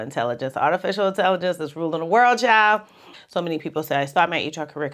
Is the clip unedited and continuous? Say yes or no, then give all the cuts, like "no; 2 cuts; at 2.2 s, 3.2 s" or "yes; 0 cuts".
no; 1 cut; at 3.1 s